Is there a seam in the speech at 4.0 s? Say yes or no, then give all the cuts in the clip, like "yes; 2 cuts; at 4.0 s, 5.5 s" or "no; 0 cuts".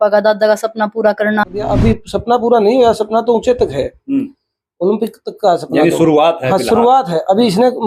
no; 1 cut; at 1.6 s